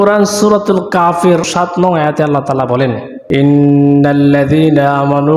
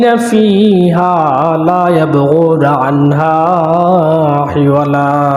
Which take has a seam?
first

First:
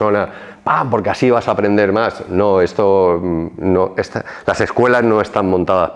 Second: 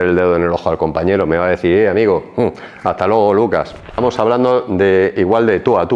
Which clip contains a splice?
second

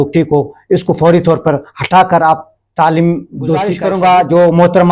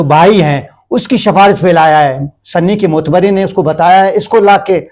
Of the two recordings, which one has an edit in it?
first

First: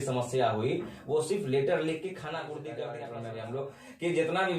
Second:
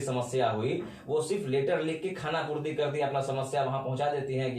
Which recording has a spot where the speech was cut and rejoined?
first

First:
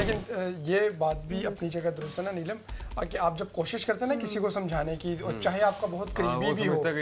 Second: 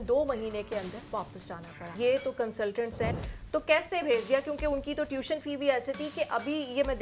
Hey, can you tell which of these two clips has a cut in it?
second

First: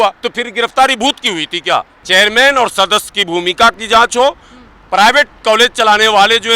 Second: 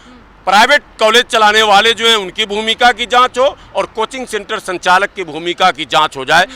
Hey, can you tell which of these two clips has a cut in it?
first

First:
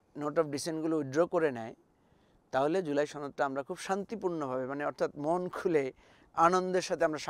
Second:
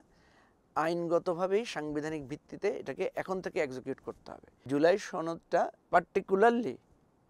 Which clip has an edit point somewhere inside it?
second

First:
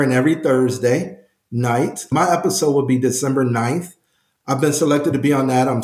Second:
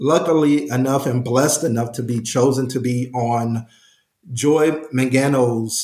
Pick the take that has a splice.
first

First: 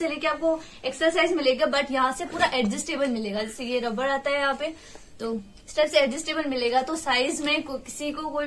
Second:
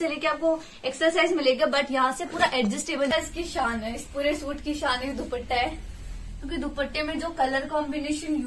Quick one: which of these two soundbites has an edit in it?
second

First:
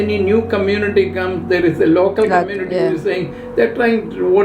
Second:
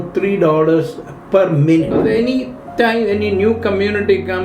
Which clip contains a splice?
second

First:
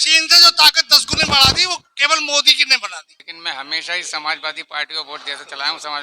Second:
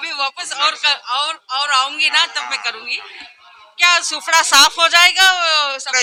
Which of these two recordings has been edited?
first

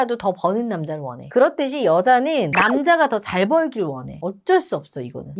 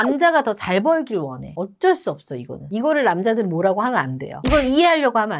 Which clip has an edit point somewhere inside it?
first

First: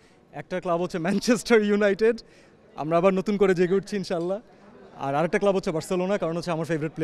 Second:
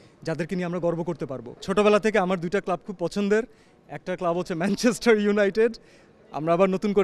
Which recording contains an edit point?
second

